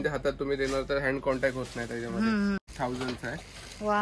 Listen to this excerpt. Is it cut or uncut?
cut